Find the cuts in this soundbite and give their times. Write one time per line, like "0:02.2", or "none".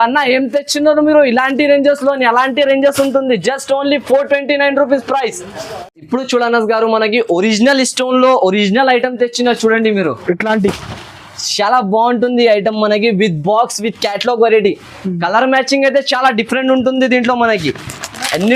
none

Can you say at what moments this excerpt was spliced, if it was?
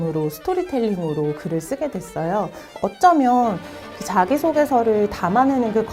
0:02.7

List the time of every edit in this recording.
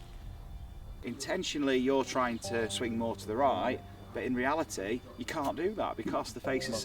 0:01.0
0:02.7

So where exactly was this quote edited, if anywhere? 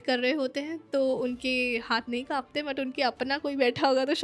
none

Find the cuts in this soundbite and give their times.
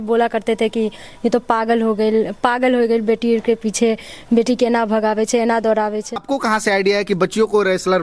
0:06.2

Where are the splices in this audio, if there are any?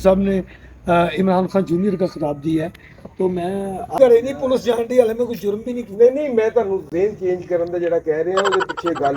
0:04.0

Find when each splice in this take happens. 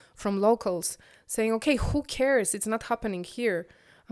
none

